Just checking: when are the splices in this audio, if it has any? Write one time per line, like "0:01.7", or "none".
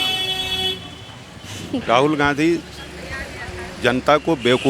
0:01.8